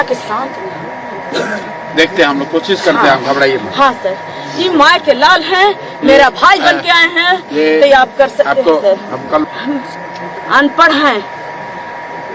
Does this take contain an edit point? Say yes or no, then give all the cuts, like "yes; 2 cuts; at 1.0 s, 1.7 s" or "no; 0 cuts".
yes; 1 cut; at 9.4 s